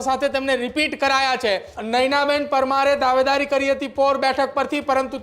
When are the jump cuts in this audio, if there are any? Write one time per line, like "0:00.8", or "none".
0:01.7